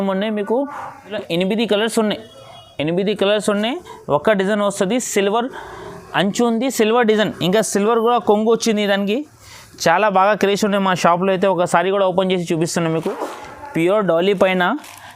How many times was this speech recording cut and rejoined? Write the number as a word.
two